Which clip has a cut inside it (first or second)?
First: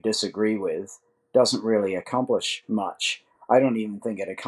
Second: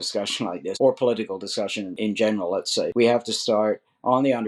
second